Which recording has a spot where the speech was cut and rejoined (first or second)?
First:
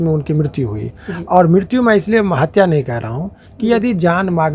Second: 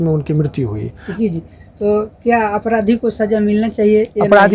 second